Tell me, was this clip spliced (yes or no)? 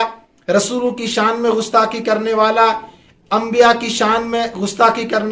no